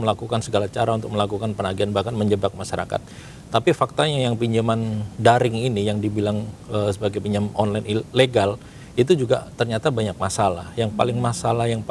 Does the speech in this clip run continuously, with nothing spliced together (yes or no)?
yes